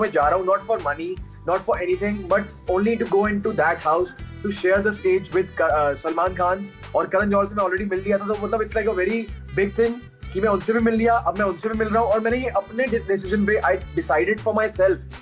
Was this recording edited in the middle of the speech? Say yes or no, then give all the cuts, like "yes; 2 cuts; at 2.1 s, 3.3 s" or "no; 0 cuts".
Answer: no; 0 cuts